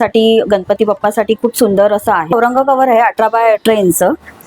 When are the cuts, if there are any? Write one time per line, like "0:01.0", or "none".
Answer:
0:02.3